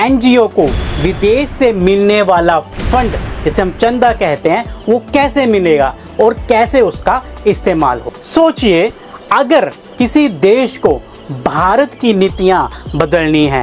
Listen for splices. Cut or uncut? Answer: cut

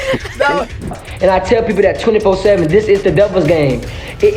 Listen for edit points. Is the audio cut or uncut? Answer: cut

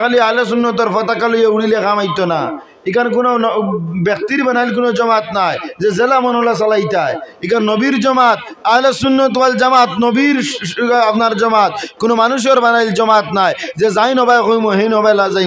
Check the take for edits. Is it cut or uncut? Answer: uncut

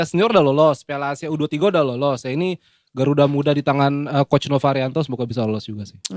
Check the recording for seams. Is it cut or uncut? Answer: uncut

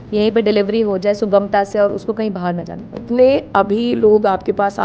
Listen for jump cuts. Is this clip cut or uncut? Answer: cut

